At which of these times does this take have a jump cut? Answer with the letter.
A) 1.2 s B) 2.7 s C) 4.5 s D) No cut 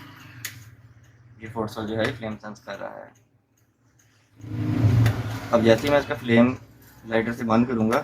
C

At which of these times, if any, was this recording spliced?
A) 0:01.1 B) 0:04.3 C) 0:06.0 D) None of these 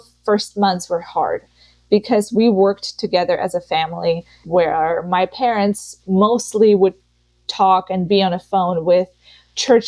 B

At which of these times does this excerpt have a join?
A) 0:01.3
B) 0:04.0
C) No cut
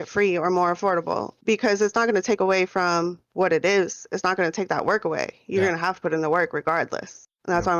A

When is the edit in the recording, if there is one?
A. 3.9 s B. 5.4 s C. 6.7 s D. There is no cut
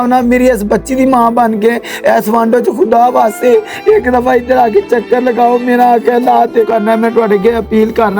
C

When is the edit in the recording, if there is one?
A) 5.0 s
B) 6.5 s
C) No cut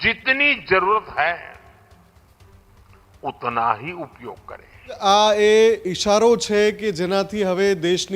A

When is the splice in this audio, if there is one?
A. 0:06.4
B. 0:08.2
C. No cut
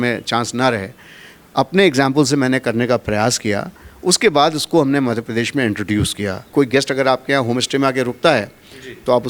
A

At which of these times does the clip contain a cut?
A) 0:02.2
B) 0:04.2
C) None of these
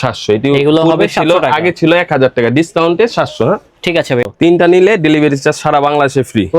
B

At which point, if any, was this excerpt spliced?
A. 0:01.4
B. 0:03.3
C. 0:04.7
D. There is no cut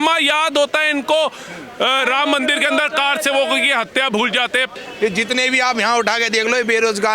C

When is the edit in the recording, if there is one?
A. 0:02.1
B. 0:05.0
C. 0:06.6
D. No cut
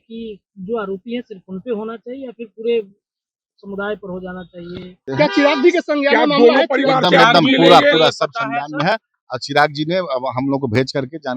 B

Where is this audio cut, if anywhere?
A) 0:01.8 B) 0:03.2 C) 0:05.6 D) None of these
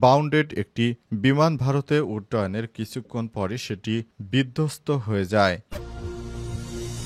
C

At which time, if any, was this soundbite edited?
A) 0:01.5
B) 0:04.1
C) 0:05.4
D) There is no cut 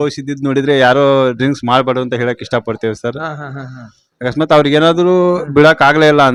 D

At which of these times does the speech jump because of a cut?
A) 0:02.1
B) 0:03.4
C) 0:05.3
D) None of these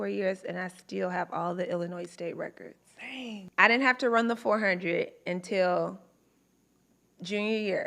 B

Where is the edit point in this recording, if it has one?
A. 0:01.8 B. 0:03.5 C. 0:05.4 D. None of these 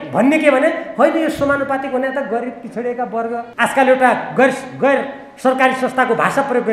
B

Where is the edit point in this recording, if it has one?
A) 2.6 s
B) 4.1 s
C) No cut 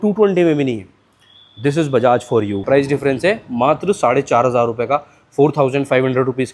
A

